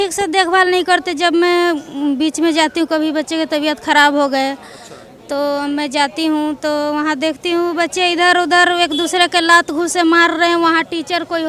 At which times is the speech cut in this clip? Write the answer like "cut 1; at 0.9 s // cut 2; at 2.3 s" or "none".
none